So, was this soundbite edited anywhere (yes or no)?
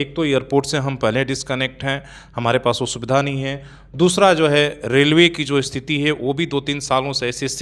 no